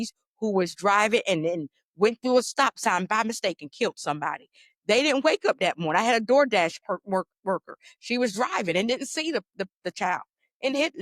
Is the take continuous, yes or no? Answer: yes